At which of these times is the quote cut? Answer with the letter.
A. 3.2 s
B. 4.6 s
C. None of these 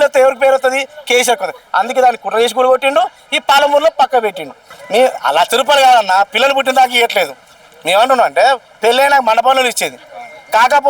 B